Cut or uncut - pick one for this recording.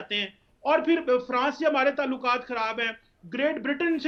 uncut